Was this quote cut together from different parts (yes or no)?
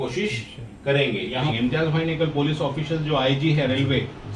yes